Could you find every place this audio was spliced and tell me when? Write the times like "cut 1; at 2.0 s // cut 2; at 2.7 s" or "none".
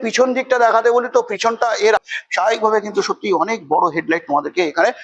cut 1; at 2.0 s